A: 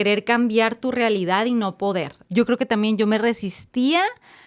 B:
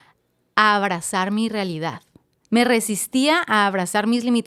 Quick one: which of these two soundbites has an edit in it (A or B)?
A